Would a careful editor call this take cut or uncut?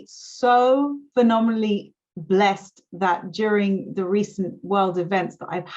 cut